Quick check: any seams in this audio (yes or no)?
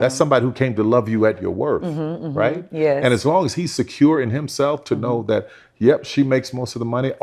no